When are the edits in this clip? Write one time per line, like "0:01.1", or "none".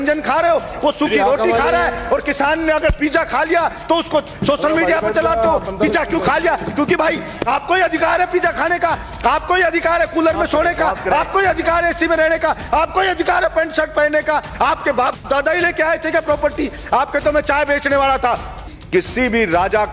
0:18.7